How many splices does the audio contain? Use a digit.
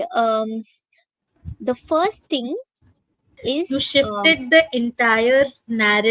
1